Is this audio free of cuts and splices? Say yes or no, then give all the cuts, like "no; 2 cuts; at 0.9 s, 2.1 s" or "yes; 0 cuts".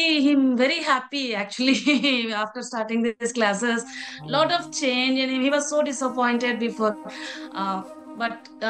yes; 0 cuts